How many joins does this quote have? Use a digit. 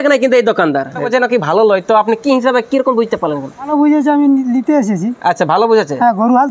2